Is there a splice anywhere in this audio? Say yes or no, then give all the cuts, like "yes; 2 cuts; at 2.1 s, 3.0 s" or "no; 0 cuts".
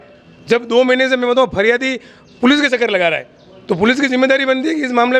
no; 0 cuts